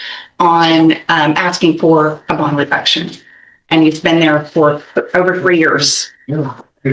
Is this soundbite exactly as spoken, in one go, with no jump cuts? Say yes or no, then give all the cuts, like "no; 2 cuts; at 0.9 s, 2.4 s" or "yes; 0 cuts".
yes; 0 cuts